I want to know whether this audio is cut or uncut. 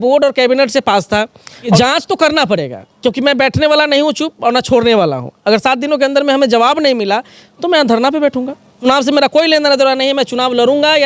cut